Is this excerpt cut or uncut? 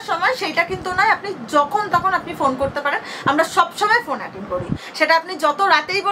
uncut